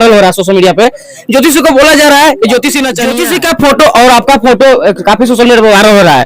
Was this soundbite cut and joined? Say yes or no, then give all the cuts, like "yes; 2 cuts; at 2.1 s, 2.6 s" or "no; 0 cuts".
yes; 1 cut; at 3.0 s